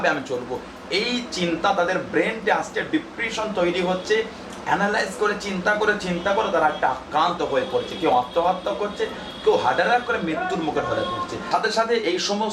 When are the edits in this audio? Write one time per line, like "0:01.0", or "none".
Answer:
0:11.4